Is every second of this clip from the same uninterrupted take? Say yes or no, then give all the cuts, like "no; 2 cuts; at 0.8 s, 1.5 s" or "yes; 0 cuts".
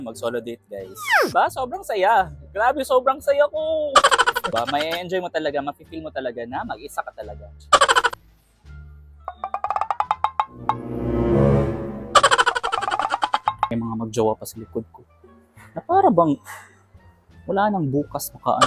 no; 3 cuts; at 4.5 s, 8.2 s, 13.7 s